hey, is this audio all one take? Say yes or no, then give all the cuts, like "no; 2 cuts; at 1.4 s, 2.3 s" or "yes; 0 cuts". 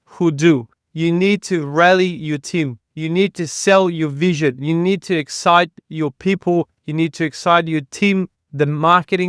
yes; 0 cuts